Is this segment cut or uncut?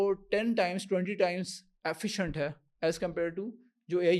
uncut